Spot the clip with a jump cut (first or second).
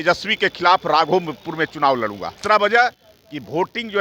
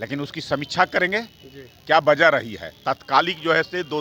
first